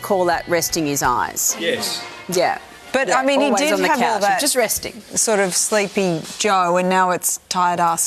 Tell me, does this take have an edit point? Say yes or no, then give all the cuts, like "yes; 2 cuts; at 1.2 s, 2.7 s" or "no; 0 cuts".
no; 0 cuts